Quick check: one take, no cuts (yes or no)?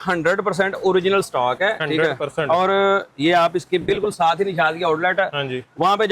yes